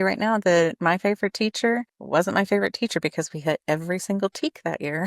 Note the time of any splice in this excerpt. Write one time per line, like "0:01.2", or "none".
0:01.9